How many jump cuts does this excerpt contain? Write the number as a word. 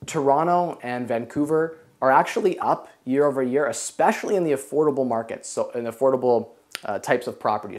zero